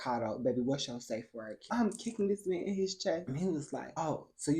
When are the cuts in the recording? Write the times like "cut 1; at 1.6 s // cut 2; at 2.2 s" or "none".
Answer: cut 1; at 1.7 s